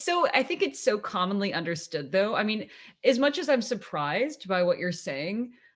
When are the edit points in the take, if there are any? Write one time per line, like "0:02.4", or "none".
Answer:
none